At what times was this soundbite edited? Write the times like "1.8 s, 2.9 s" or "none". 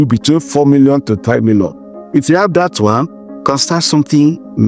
none